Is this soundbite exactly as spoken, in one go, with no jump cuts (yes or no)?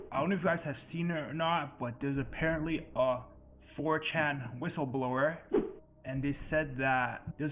yes